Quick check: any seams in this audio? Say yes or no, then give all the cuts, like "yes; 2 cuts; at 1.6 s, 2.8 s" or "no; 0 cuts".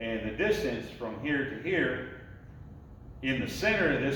no; 0 cuts